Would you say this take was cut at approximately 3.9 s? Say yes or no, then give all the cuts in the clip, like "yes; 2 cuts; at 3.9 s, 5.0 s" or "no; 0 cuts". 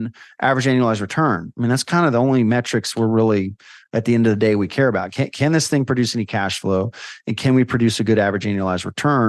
no; 0 cuts